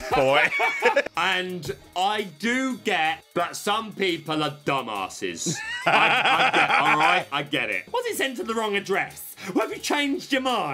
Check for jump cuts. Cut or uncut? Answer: cut